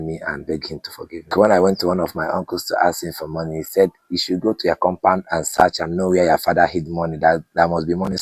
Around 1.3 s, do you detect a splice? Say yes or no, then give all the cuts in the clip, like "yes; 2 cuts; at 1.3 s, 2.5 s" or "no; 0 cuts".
yes; 1 cut; at 1.3 s